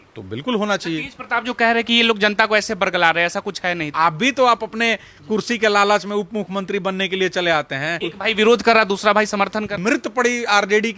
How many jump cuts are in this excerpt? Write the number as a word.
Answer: three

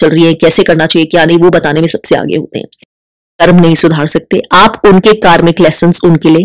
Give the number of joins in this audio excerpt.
one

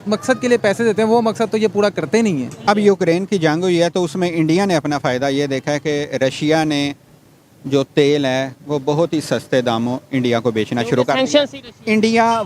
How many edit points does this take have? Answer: one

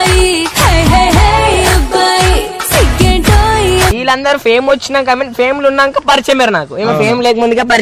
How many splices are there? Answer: one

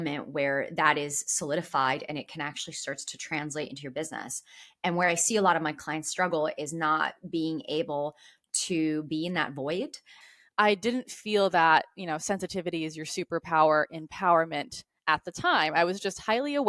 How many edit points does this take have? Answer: one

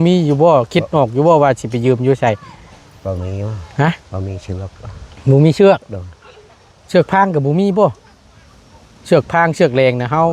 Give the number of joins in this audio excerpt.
zero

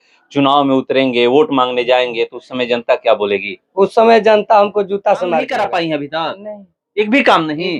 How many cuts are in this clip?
one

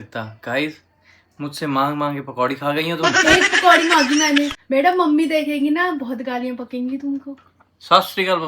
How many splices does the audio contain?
one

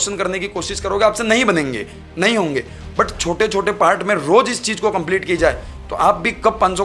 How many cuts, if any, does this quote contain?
zero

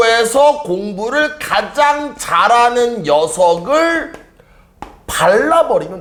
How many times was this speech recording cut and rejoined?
zero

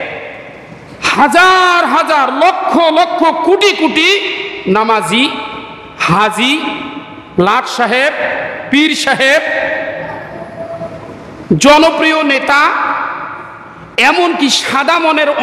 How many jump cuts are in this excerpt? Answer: zero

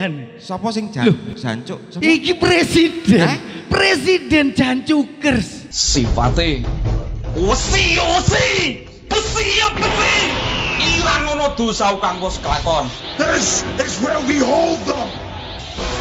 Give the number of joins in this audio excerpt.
one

